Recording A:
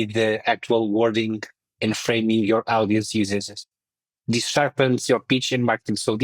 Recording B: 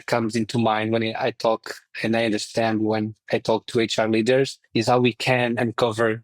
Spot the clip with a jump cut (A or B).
B